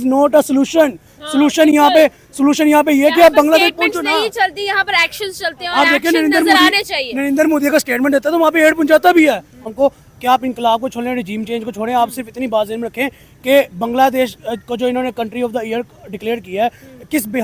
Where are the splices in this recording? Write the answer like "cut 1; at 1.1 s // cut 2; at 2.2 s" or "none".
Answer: cut 1; at 9.6 s